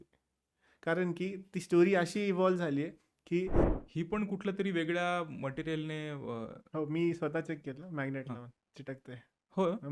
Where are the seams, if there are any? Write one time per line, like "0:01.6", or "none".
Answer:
0:03.7

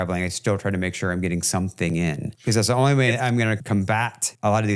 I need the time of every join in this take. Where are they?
0:02.3
0:03.7

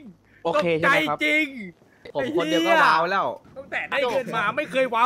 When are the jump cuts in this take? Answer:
0:03.4

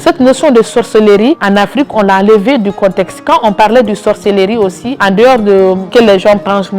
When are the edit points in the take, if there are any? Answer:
0:01.4
0:04.9
0:05.8

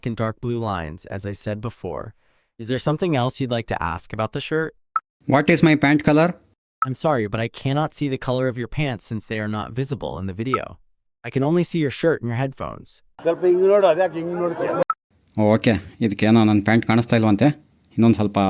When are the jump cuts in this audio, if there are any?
none

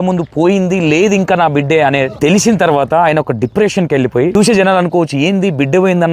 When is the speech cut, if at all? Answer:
0:02.1
0:04.3

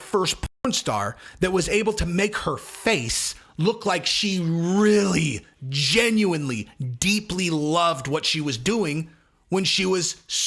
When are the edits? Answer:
none

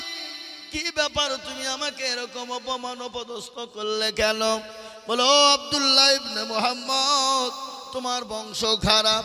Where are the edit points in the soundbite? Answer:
none

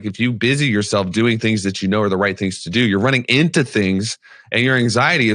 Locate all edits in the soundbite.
none

